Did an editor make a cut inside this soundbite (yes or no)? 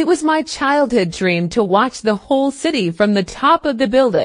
no